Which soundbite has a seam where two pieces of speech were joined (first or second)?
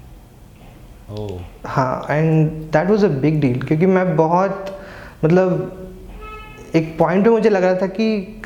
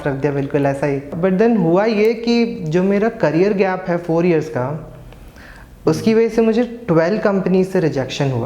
second